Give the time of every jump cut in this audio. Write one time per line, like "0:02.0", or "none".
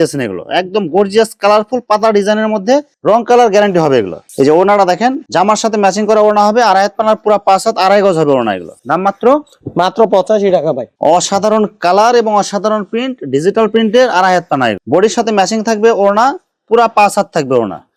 none